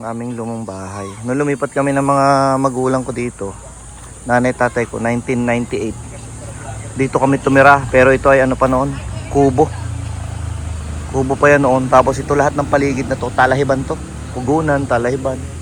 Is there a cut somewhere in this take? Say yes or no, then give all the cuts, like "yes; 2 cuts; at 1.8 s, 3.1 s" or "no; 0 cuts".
no; 0 cuts